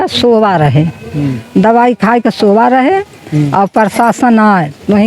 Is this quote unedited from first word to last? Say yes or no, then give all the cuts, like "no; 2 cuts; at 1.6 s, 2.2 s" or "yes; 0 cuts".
yes; 0 cuts